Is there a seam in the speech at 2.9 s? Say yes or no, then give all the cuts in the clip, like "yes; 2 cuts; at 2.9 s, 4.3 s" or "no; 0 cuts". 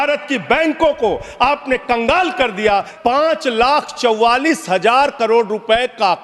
yes; 1 cut; at 2.9 s